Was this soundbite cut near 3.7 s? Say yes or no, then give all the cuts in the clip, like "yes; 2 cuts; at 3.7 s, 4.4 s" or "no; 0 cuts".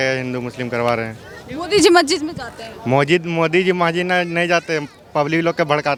no; 0 cuts